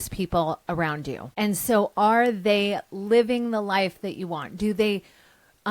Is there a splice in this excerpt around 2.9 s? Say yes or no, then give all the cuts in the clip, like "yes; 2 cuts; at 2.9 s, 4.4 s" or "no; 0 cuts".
no; 1 cut; at 1.2 s